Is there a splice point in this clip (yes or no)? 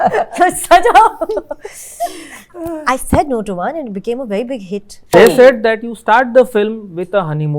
yes